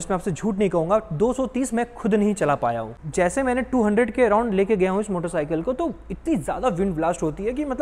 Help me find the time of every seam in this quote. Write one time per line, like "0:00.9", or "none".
none